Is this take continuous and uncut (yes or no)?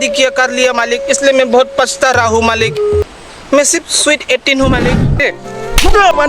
no